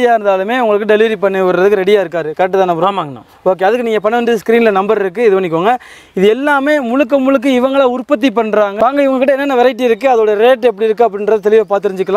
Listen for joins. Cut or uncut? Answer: uncut